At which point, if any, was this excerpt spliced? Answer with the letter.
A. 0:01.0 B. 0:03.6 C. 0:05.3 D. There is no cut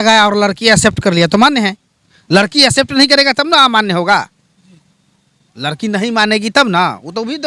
D